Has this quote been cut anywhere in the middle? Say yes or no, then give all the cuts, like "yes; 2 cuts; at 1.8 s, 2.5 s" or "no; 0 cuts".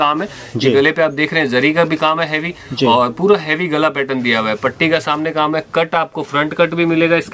no; 0 cuts